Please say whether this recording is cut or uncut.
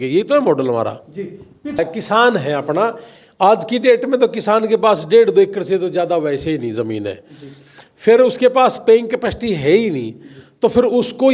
cut